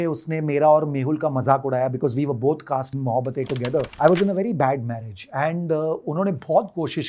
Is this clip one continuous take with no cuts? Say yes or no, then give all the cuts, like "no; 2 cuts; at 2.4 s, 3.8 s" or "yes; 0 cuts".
no; 2 cuts; at 3.0 s, 3.9 s